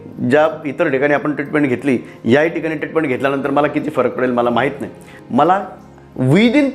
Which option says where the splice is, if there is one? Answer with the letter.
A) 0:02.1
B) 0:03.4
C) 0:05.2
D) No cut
C